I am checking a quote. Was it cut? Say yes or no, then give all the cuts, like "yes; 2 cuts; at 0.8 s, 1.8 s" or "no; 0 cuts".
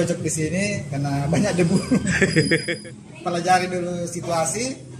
yes; 1 cut; at 2.7 s